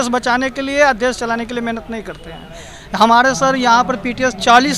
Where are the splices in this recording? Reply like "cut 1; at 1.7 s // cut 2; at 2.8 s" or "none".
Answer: none